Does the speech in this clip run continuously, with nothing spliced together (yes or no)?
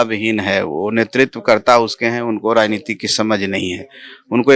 yes